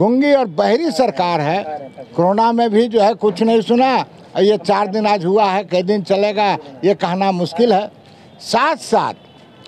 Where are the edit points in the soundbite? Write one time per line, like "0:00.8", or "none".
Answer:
none